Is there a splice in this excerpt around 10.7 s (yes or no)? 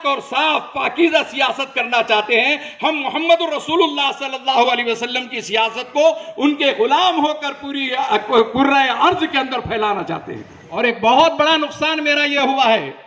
yes